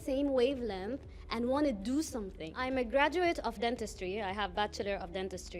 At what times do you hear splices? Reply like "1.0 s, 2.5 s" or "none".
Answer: 2.5 s